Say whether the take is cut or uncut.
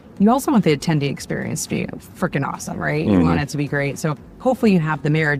uncut